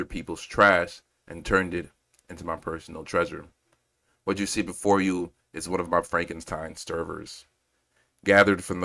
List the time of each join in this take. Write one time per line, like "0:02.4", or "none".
none

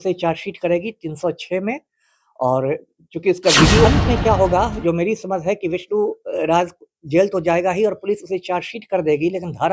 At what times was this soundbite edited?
0:03.9

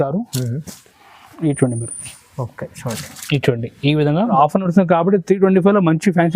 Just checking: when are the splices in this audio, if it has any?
0:04.3

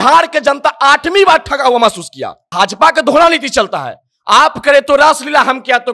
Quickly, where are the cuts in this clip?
0:02.5

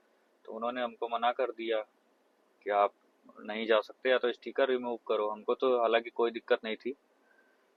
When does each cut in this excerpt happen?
none

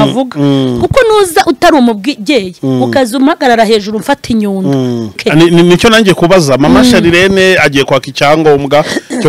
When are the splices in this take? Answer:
0:05.2

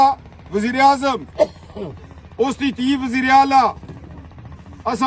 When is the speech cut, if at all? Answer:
none

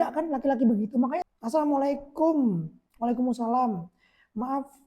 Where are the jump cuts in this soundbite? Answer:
0:01.2

